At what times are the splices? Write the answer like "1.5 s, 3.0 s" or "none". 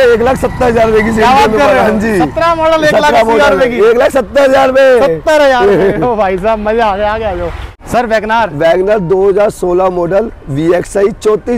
none